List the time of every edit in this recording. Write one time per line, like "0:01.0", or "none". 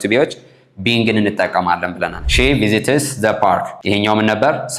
0:02.2
0:03.7